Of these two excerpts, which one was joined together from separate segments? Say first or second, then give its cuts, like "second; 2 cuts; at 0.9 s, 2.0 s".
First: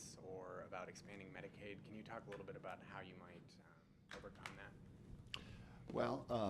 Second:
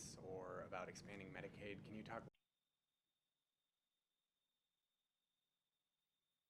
first; 1 cut; at 2.2 s